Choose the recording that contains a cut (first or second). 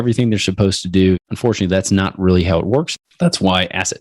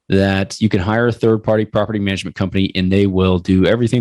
first